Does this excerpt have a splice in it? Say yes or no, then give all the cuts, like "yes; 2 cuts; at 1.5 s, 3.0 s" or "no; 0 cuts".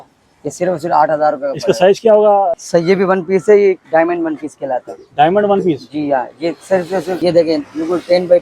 yes; 2 cuts; at 2.6 s, 7.1 s